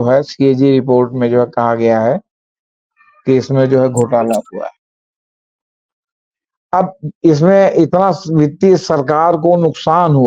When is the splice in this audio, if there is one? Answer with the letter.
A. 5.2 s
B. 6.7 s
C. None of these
C